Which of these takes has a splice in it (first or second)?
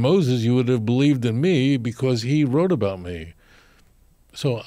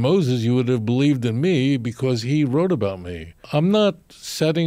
second